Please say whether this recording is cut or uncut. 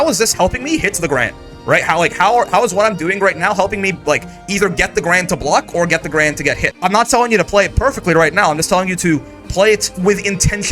cut